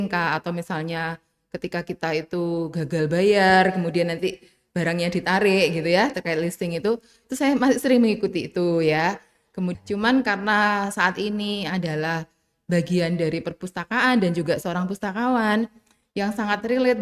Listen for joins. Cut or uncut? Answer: cut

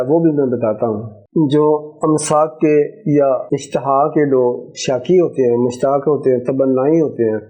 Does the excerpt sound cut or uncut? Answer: cut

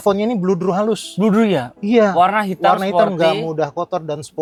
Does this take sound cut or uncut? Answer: uncut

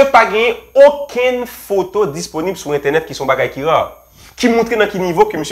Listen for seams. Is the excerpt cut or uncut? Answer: uncut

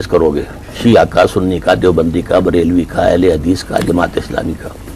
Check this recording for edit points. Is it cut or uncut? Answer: uncut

